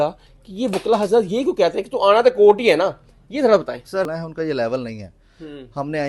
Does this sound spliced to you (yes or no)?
yes